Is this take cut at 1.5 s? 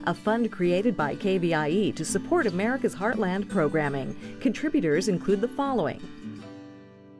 no; 1 cut; at 6.0 s

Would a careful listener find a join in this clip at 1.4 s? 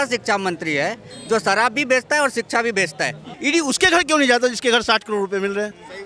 no; 1 cut; at 3.3 s

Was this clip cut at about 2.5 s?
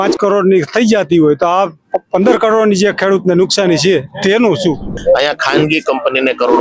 no; 1 cut; at 4.9 s

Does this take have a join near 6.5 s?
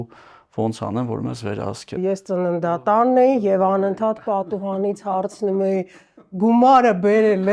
no; 1 cut; at 2.0 s

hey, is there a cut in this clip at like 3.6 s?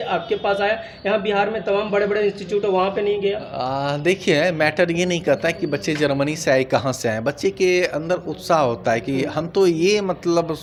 no; 0 cuts

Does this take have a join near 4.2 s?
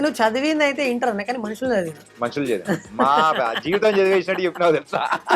no; 1 cut; at 2.0 s

